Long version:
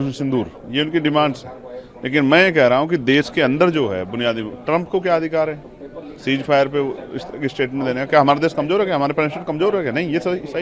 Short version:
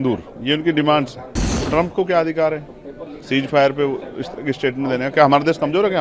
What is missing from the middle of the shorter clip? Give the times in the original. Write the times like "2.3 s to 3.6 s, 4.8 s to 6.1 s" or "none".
1.8 s to 4.5 s